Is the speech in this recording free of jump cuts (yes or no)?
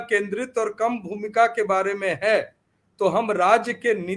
yes